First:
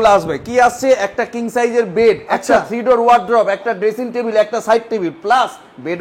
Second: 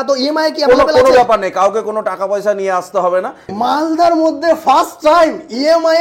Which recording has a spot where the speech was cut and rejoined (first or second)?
second